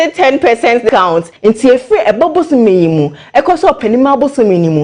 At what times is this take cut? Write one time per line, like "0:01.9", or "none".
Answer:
0:00.9